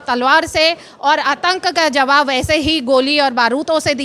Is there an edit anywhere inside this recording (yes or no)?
no